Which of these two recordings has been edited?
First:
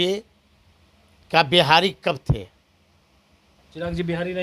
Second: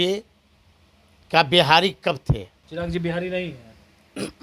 second; 1 cut; at 2.6 s

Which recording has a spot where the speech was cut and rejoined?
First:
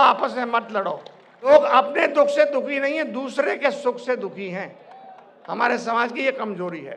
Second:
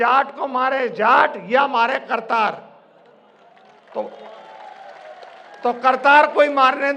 first; 1 cut; at 1.5 s

